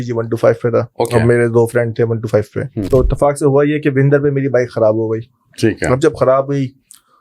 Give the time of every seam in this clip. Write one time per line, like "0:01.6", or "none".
0:02.9

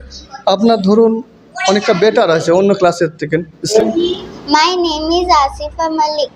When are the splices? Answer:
0:03.6

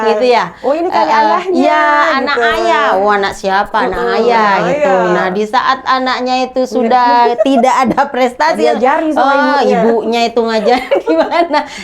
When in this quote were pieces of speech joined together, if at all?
none

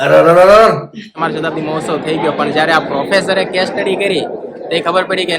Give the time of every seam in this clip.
0:01.0

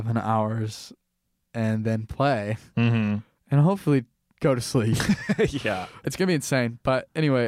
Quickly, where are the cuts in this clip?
0:06.0

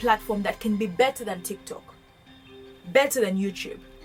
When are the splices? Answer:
none

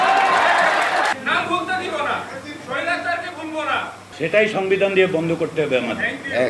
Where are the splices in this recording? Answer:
0:01.1
0:04.0

